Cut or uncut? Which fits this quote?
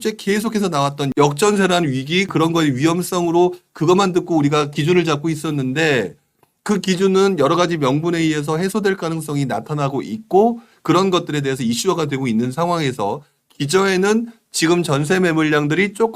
cut